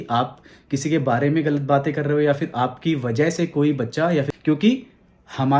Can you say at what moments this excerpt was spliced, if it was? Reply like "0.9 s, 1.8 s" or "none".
4.3 s